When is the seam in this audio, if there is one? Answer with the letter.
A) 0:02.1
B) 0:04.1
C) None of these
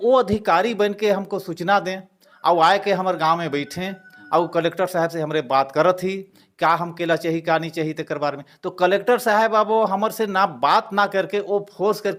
C